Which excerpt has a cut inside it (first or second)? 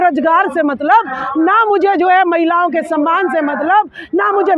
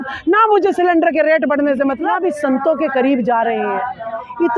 second